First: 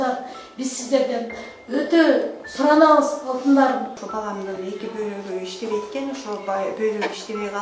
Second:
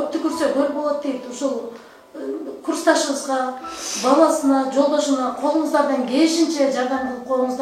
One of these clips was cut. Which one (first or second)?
first